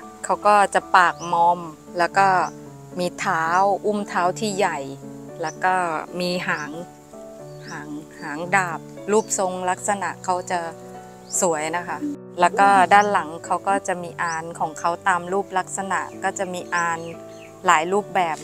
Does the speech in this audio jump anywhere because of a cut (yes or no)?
no